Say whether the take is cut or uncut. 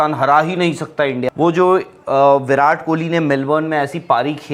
cut